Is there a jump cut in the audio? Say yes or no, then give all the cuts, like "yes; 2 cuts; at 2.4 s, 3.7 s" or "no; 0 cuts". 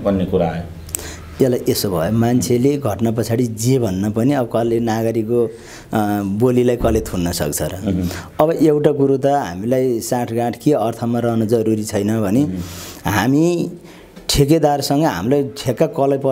no; 0 cuts